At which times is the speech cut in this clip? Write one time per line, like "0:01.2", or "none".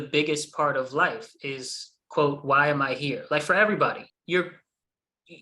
0:04.1